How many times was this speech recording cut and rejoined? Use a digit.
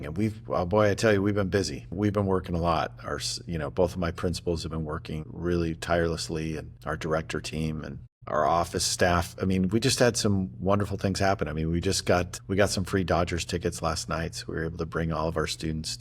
5